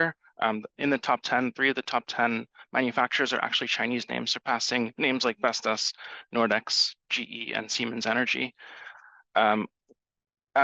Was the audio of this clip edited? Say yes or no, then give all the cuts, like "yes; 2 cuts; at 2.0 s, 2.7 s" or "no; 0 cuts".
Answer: no; 0 cuts